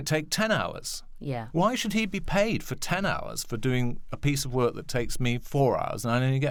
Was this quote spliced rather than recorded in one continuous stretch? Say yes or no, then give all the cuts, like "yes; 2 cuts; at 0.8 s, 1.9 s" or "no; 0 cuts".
no; 0 cuts